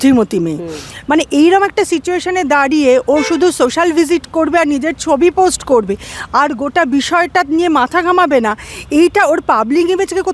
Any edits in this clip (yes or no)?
no